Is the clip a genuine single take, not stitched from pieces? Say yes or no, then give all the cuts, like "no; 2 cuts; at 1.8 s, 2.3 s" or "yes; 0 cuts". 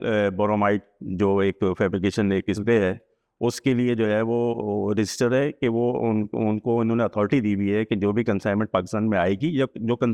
yes; 0 cuts